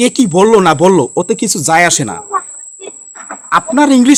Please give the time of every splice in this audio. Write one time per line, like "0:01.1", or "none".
none